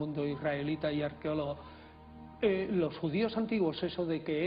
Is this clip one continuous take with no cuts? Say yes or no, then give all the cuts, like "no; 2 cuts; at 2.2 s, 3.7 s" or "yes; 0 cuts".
no; 1 cut; at 2.7 s